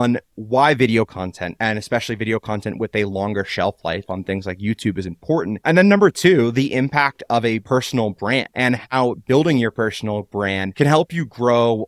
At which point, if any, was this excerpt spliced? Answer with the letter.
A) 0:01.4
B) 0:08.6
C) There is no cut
A